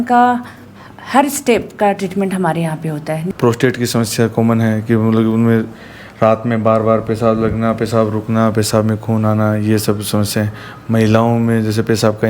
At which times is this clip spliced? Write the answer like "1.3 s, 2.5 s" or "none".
3.3 s